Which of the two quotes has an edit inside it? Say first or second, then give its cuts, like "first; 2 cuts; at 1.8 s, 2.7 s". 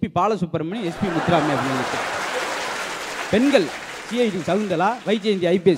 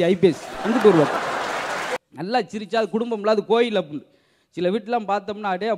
second; 1 cut; at 2.0 s